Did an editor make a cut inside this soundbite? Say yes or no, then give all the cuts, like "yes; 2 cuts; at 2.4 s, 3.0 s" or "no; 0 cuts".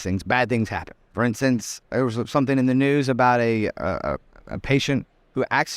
yes; 2 cuts; at 1.0 s, 1.8 s